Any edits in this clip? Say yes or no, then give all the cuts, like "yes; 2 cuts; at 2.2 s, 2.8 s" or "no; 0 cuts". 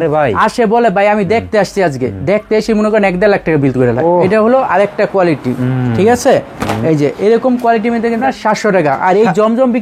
yes; 2 cuts; at 4.0 s, 8.2 s